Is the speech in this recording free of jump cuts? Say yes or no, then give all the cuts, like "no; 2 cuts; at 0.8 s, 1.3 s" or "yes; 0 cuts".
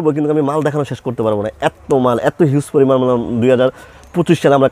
yes; 0 cuts